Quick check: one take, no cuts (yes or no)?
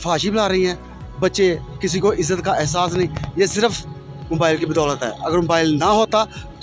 yes